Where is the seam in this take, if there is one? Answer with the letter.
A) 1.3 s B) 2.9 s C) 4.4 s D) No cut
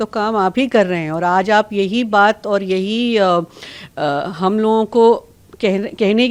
D